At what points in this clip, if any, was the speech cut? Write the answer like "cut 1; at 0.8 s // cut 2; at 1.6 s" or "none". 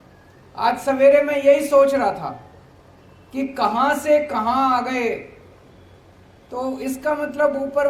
none

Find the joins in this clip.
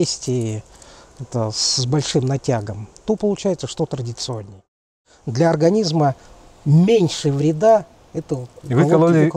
cut 1; at 4.7 s

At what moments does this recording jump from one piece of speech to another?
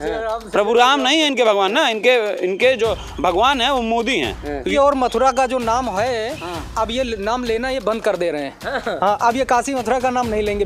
cut 1; at 4.7 s

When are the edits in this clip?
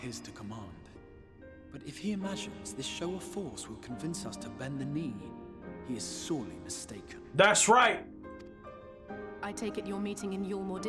none

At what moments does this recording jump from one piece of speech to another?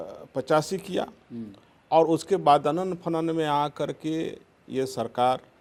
none

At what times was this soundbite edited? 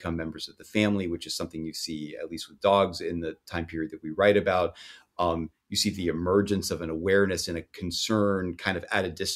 none

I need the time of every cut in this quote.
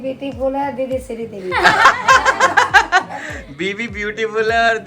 none

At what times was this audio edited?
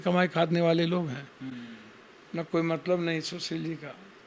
none

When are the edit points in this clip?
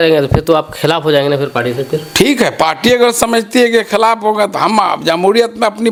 none

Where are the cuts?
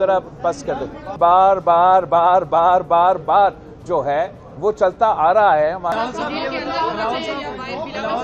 cut 1; at 1.1 s // cut 2; at 5.9 s

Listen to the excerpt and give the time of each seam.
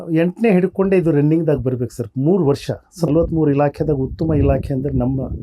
cut 1; at 3.1 s

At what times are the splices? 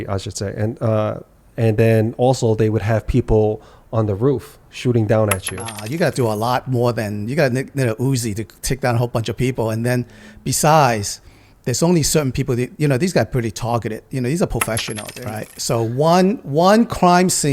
cut 1; at 5.8 s // cut 2; at 15.1 s

